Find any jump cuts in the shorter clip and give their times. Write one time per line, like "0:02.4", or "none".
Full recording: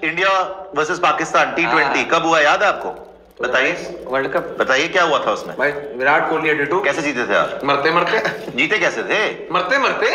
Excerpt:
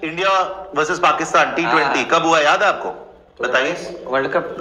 none